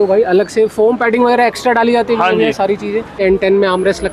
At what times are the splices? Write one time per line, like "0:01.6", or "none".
0:03.2